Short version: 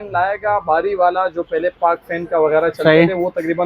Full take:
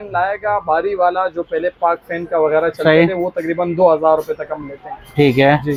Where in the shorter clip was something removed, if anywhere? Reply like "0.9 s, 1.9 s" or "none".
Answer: none